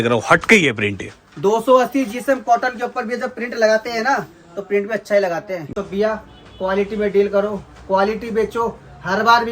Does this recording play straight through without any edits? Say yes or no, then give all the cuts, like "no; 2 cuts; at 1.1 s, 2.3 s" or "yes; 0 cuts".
no; 1 cut; at 5.7 s